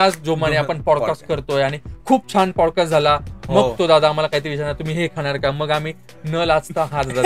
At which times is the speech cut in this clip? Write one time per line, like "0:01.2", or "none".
none